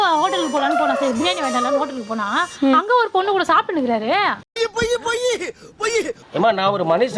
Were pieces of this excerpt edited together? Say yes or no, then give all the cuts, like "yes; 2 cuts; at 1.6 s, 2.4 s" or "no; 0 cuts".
yes; 1 cut; at 6.2 s